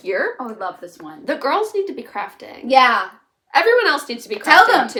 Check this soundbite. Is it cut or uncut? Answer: uncut